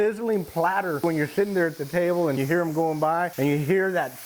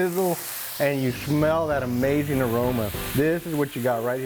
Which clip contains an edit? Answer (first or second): first